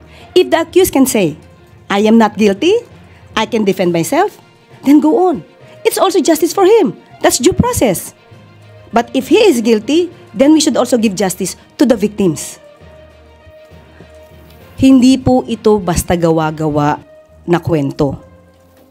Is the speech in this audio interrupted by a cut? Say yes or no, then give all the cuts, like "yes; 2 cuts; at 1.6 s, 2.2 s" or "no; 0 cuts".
yes; 2 cuts; at 12.5 s, 14.3 s